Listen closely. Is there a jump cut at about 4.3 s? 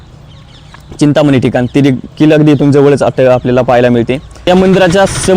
yes; 1 cut; at 4.3 s

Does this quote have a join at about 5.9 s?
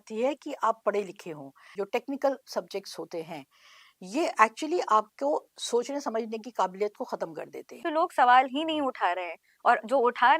no; 2 cuts; at 1.6 s, 7.8 s

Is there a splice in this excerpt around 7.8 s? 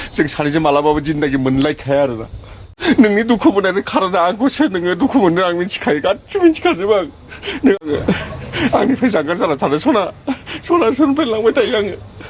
yes; 2 cuts; at 2.7 s, 7.8 s

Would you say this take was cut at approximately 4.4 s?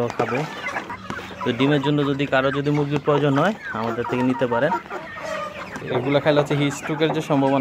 no; 2 cuts; at 1.0 s, 5.8 s

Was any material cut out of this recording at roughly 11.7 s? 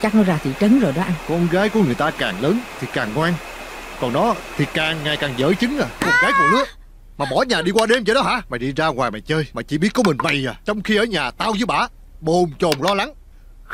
no; 3 cuts; at 1.2 s, 5.9 s, 8.5 s

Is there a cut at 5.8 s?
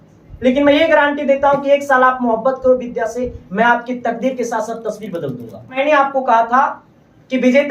yes; 1 cut; at 5.8 s

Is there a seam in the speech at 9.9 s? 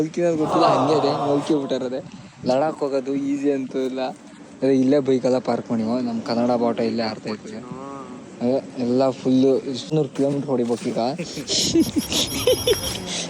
yes; 1 cut; at 9.9 s

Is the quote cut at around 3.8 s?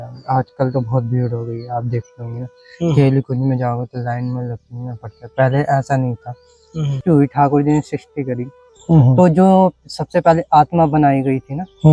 no; 1 cut; at 7.0 s

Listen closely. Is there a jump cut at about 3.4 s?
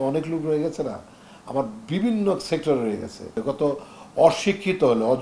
yes; 1 cut; at 3.4 s

